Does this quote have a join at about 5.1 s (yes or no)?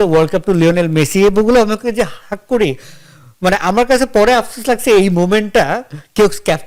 no